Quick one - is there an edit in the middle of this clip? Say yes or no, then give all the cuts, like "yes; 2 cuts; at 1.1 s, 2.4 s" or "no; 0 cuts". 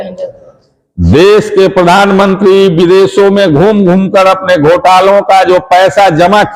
no; 0 cuts